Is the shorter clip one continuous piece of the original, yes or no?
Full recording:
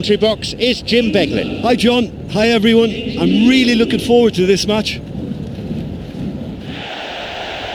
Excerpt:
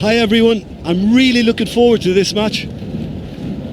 no